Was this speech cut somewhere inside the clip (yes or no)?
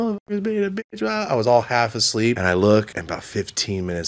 yes